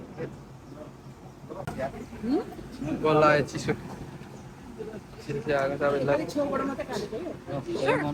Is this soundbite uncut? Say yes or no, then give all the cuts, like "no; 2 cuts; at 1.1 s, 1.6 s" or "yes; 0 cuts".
yes; 0 cuts